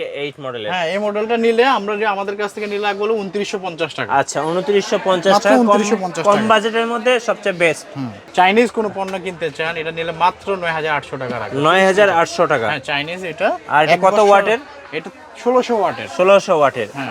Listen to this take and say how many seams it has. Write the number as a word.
one